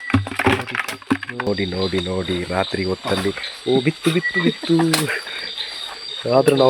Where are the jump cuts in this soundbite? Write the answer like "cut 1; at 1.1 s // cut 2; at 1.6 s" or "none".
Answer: cut 1; at 1.5 s